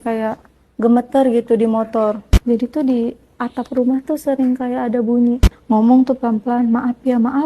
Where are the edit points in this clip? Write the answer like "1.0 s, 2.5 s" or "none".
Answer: 2.3 s, 5.5 s